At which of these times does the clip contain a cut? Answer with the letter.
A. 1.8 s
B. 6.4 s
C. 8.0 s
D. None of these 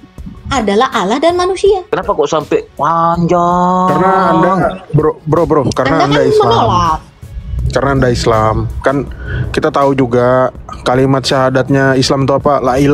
A